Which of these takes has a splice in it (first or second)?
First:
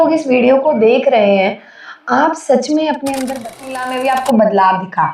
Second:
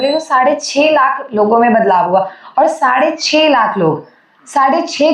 first